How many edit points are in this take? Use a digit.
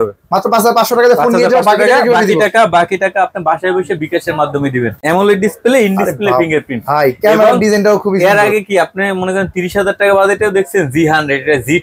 1